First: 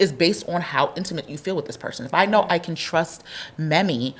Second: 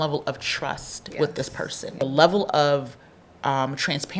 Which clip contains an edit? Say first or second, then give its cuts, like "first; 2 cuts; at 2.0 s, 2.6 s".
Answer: second; 1 cut; at 2.0 s